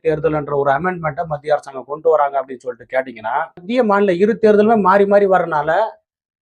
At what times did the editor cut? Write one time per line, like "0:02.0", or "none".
0:03.6